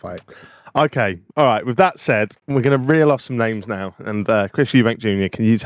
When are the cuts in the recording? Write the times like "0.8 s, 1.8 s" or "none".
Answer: none